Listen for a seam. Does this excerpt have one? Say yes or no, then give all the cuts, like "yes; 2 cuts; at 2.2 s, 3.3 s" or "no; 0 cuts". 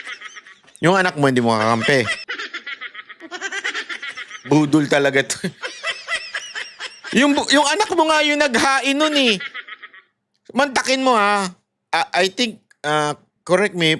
no; 0 cuts